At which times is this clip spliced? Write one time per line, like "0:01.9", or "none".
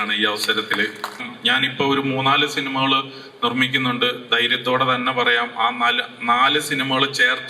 0:01.3

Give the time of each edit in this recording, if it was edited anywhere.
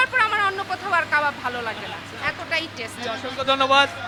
none

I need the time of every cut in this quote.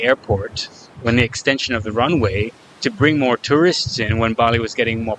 none

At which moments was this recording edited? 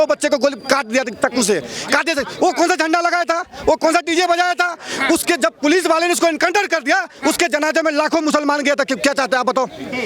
none

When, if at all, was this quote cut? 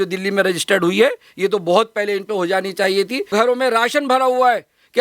0:03.3

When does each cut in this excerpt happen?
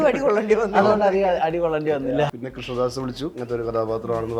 0:02.0
0:03.4

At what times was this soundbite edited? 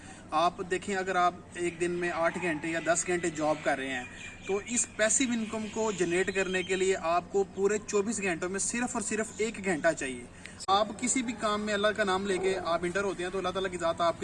0:10.6

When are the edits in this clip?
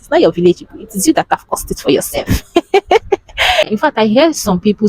0:03.6

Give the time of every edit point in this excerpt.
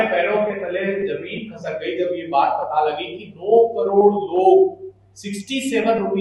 none

